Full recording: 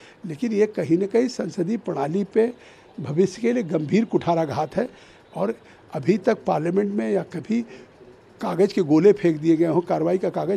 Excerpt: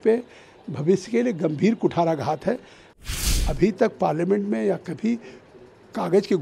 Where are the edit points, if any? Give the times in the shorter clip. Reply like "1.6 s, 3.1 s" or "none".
3.1 s